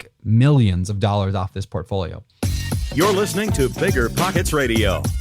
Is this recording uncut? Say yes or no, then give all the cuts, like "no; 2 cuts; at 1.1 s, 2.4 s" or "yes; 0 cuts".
no; 1 cut; at 2.3 s